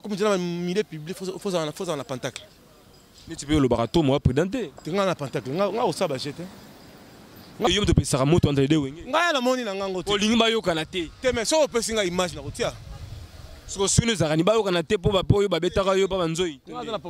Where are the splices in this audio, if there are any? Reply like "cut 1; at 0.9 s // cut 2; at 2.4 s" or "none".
cut 1; at 7.7 s